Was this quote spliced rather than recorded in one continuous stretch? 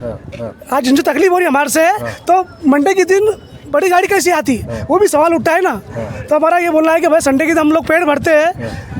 no; 0 cuts

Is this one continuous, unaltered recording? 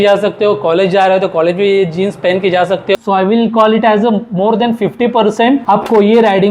no; 1 cut; at 3.0 s

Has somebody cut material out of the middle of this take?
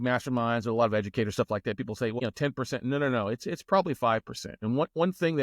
yes; 1 cut; at 2.2 s

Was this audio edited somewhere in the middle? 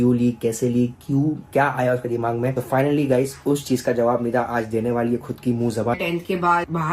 yes; 1 cut; at 6.0 s

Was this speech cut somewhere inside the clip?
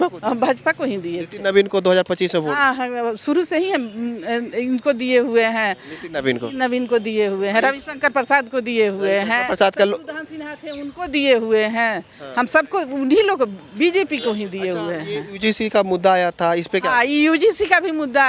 no; 0 cuts

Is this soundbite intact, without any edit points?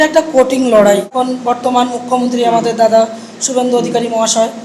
no; 1 cut; at 1.2 s

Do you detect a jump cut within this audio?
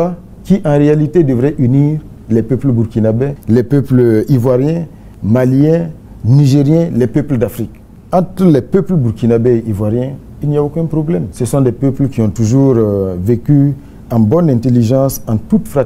yes; 1 cut; at 8.0 s

